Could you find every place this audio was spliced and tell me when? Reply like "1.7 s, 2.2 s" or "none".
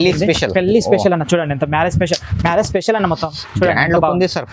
none